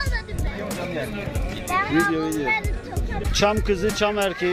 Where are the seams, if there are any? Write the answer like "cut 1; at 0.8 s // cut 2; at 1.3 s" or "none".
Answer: cut 1; at 3.2 s